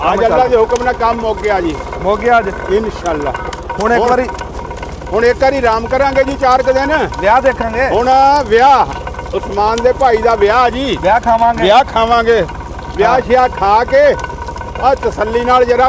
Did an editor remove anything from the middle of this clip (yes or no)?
no